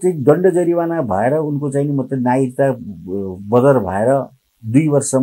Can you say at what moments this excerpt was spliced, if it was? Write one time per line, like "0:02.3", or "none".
none